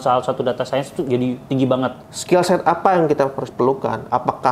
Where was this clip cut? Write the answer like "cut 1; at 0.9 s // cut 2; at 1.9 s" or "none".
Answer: cut 1; at 2.1 s